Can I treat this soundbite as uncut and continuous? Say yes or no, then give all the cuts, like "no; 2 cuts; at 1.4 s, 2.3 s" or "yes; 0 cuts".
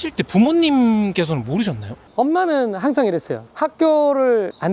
no; 2 cuts; at 2.0 s, 3.5 s